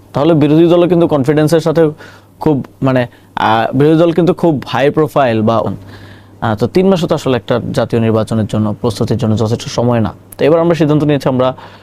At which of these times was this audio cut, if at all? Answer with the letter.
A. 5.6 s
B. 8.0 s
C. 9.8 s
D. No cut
A